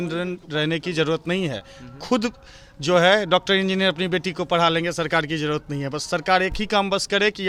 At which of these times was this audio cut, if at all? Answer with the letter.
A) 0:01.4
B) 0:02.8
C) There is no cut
C